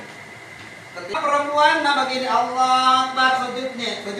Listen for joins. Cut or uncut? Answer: cut